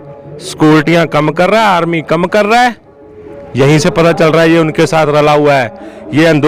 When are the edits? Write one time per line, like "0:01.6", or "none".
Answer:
none